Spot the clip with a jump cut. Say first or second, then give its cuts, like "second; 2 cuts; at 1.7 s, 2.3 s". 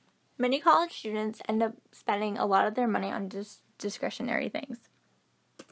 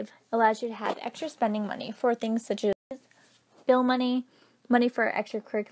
second; 1 cut; at 2.9 s